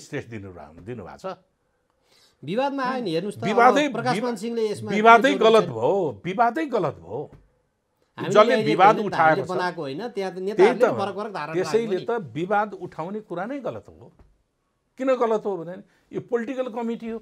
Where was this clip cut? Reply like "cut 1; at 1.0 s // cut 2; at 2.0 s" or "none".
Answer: none